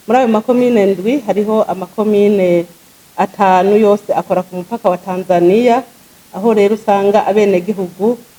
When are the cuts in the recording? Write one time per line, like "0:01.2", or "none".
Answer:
none